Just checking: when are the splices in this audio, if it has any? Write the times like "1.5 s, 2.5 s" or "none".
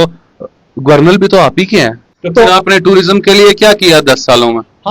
2.1 s